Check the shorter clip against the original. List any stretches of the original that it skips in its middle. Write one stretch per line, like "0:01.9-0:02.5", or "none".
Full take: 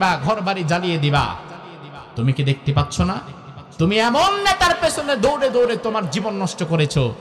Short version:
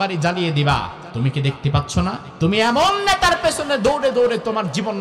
0:01.5-0:02.0
0:03.3-0:03.6